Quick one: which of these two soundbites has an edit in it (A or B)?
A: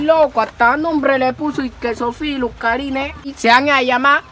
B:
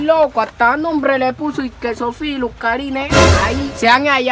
A